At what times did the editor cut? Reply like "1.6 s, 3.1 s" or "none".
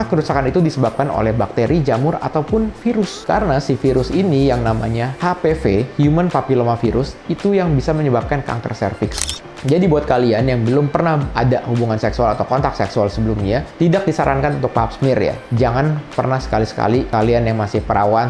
9.3 s